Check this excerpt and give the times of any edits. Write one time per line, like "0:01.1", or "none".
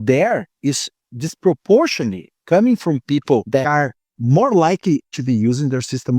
0:03.7
0:05.1

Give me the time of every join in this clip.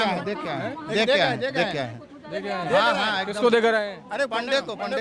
none

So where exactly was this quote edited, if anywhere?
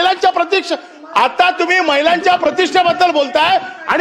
none

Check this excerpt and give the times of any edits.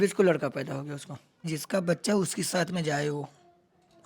0:01.6

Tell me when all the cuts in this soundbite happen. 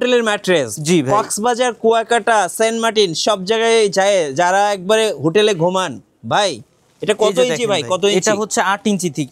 none

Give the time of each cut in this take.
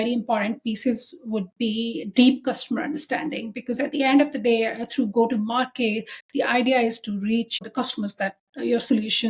0:07.6

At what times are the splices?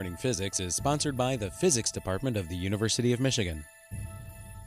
0:03.7

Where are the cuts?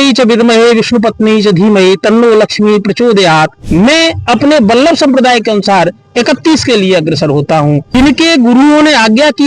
0:03.6
0:07.9

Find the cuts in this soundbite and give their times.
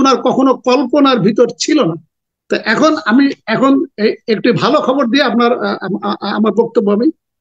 none

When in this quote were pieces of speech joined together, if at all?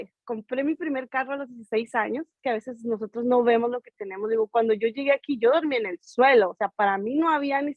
0:02.4

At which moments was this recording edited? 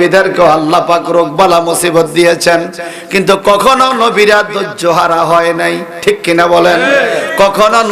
none

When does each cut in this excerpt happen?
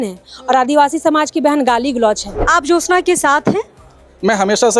0:02.3

